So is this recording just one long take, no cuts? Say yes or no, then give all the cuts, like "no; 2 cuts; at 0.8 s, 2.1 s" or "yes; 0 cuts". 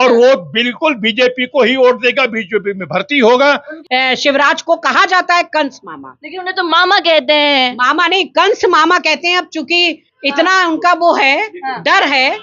no; 1 cut; at 3.7 s